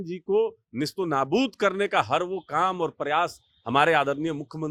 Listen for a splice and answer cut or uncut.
uncut